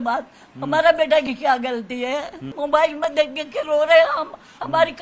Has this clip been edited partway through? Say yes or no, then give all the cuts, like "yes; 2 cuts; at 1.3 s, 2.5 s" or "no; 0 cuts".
yes; 1 cut; at 2.5 s